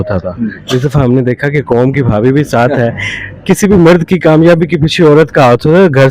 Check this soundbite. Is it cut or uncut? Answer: uncut